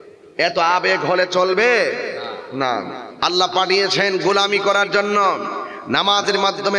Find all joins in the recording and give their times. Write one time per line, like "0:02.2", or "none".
0:03.0